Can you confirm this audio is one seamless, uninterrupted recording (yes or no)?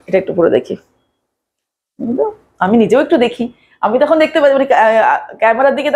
yes